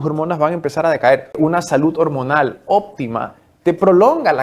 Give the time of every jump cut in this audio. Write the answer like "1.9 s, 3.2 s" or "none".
1.3 s